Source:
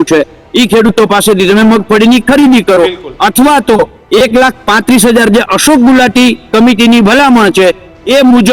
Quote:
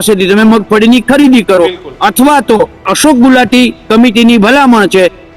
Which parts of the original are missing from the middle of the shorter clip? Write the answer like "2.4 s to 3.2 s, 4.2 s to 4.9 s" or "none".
4.0 s to 5.5 s